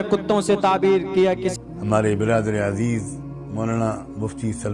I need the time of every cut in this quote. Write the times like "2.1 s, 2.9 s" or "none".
1.5 s